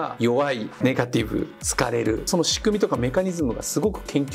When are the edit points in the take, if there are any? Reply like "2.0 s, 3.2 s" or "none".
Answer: none